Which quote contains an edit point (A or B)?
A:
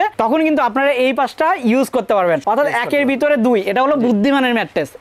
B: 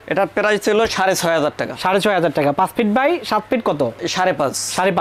B